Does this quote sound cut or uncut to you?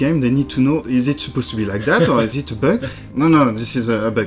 cut